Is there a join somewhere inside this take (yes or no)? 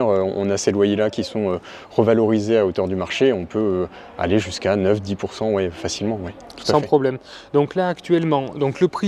no